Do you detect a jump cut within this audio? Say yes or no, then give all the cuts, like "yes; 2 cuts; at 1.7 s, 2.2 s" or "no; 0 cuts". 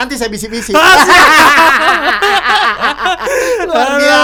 no; 0 cuts